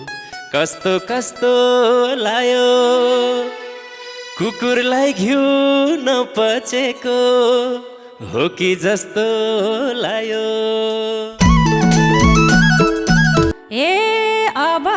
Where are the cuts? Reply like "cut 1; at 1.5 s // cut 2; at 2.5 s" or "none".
cut 1; at 13.5 s